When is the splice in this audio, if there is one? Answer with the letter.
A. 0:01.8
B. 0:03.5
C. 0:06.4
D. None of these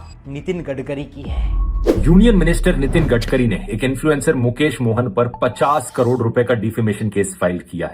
A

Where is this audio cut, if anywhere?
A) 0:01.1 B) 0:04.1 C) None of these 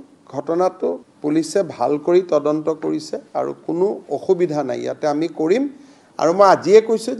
A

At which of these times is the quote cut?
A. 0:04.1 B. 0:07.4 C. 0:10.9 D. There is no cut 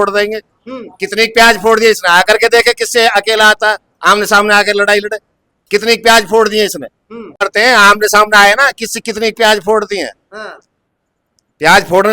B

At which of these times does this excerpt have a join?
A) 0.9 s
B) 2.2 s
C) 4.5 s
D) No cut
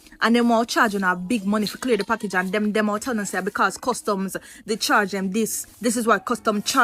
D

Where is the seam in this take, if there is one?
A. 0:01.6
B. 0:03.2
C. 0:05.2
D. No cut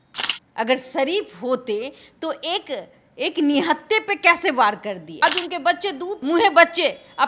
C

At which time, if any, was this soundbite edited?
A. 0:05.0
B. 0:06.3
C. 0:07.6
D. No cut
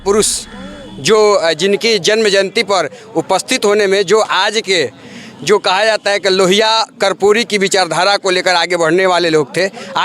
D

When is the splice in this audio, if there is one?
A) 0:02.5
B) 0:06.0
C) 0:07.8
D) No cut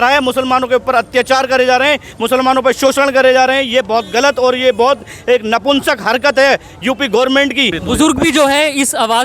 C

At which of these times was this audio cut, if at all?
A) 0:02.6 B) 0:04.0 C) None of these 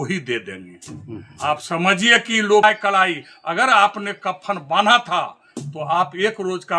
A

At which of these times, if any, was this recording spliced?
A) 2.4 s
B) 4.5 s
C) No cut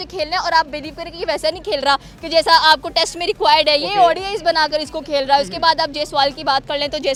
C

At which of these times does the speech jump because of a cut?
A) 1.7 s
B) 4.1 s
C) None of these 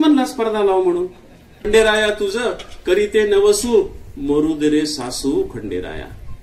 A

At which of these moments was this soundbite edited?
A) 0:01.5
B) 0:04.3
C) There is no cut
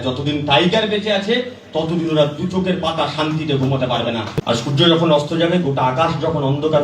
B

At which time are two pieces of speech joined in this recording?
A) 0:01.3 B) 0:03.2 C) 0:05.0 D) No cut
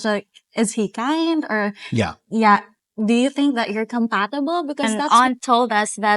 C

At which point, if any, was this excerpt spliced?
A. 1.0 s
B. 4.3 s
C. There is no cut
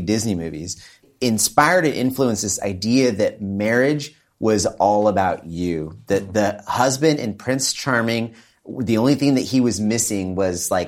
A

